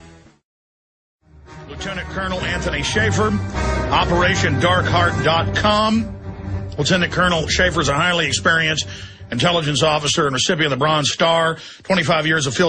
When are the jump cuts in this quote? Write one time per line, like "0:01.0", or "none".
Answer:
0:05.1